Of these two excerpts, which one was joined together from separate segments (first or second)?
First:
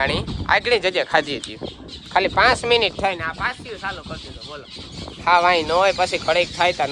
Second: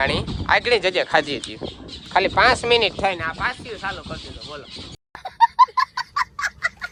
first